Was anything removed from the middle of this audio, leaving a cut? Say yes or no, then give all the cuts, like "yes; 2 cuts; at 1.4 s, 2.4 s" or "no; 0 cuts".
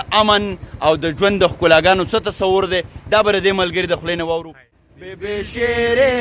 yes; 1 cut; at 4.7 s